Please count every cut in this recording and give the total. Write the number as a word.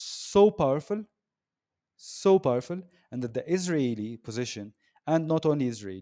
zero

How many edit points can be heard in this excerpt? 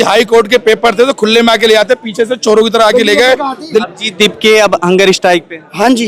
one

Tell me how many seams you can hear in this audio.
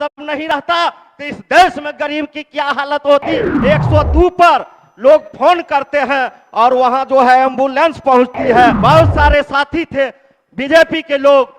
two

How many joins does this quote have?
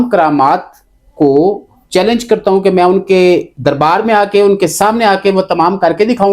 zero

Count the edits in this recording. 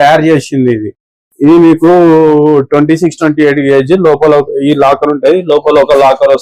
zero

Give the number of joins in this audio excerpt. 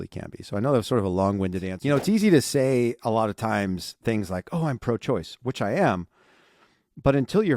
one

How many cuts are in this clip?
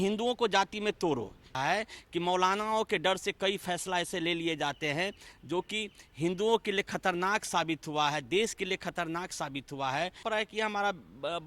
two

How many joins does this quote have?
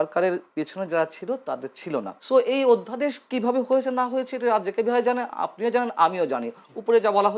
one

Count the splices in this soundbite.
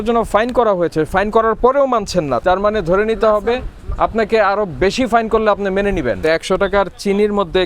three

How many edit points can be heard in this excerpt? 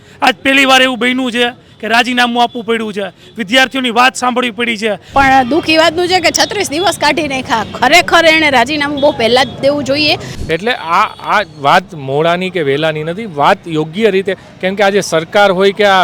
two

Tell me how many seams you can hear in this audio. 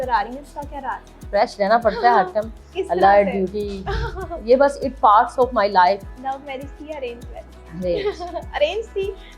two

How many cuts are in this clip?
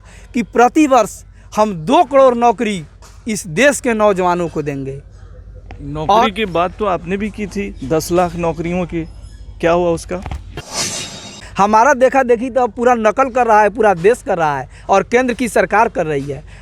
one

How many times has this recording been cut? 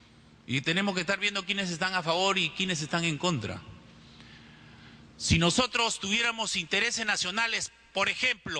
zero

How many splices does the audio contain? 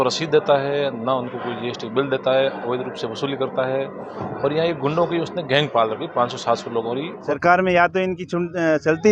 one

